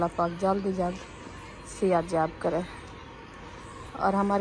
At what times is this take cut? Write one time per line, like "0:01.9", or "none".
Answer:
none